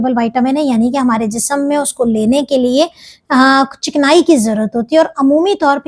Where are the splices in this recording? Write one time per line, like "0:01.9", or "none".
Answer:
none